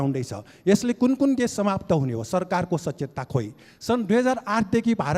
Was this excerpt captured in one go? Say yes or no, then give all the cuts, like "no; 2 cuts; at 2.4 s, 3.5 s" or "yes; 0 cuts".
yes; 0 cuts